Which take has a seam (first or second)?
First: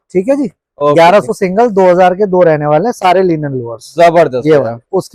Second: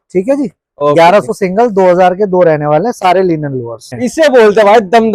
second